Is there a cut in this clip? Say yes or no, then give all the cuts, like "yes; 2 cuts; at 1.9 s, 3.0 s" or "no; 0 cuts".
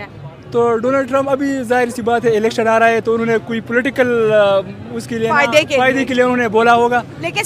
no; 0 cuts